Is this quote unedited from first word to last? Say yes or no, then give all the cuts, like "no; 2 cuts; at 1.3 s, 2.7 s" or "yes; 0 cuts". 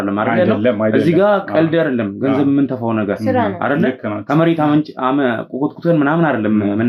yes; 0 cuts